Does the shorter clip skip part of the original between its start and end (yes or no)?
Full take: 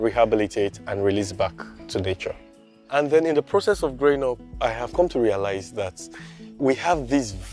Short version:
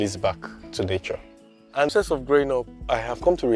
yes